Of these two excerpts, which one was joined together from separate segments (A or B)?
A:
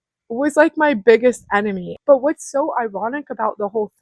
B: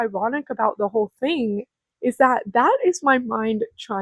A